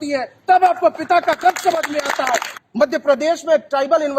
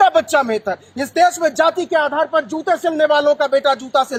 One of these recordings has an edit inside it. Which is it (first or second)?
first